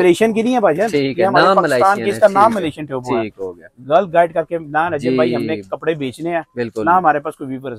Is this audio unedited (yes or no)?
yes